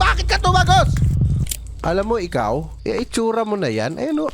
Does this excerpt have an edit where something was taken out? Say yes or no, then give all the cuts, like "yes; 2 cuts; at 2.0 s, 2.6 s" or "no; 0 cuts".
yes; 2 cuts; at 1.4 s, 2.7 s